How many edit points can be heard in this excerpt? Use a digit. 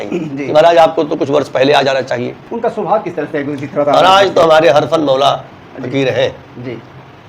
1